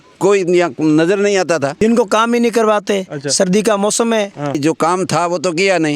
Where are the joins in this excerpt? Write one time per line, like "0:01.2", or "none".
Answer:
0:01.8
0:04.6